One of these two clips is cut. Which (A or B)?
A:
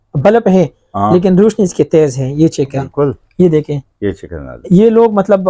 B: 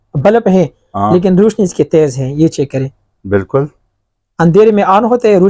A